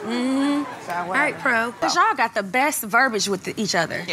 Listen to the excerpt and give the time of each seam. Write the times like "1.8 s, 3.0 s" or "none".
1.8 s